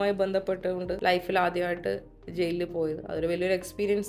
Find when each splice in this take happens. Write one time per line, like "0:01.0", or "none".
0:01.0